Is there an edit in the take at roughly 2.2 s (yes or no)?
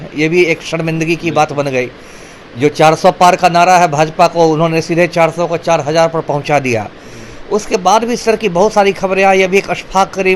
no